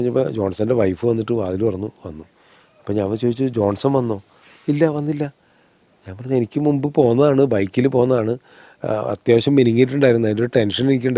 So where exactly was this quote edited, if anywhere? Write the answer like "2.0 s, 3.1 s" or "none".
none